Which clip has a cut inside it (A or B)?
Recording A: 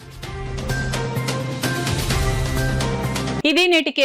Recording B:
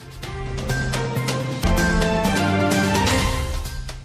B